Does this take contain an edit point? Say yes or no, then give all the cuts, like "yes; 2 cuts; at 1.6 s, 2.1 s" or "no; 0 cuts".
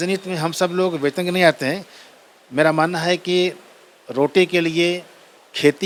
no; 0 cuts